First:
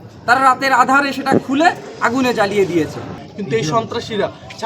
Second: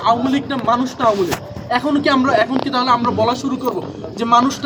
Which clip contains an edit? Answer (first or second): first